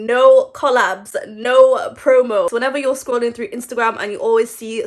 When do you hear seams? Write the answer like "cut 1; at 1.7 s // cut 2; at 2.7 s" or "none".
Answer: cut 1; at 2.5 s